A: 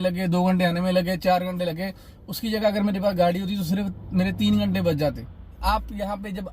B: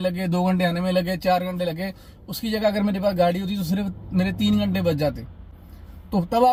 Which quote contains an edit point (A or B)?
A